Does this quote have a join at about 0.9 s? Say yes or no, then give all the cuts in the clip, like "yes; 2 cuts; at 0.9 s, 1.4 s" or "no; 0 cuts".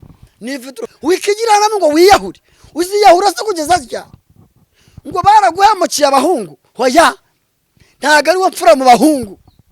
yes; 1 cut; at 0.9 s